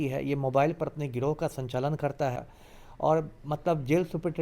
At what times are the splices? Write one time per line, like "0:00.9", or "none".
0:02.5